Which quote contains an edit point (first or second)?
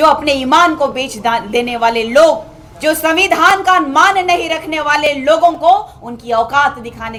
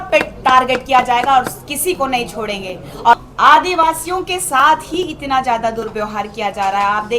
second